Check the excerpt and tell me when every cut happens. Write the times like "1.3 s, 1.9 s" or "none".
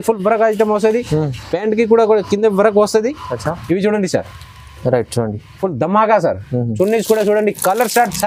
none

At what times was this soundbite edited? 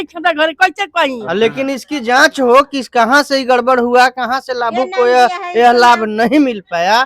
1.4 s

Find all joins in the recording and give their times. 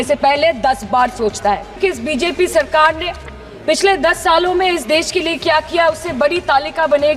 1.8 s

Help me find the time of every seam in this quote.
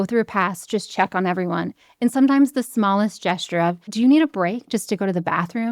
3.8 s

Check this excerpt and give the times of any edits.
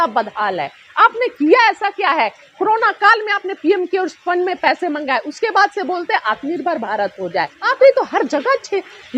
7.6 s

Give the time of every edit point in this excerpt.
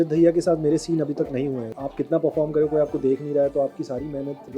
1.7 s

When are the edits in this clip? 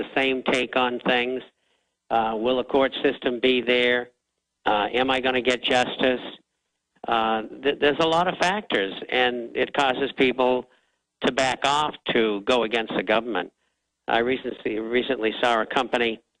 none

